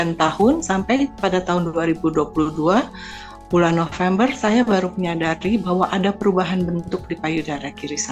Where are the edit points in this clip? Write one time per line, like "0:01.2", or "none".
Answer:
none